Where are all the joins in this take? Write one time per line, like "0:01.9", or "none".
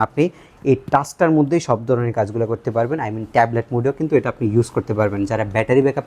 none